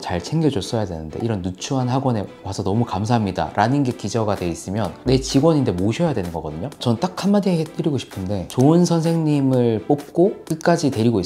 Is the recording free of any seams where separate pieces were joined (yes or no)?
no